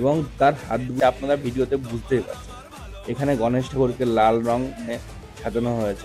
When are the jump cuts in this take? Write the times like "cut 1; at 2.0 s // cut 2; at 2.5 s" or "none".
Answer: cut 1; at 0.9 s